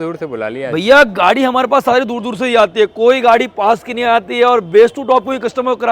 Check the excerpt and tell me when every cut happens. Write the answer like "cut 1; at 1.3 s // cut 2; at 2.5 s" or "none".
none